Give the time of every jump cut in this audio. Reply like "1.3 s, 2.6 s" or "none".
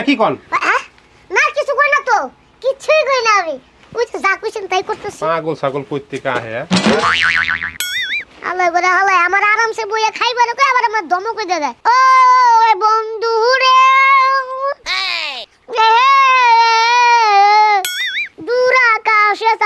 11.8 s